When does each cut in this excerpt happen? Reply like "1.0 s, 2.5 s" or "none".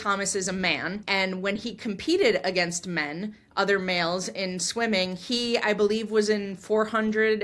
1.0 s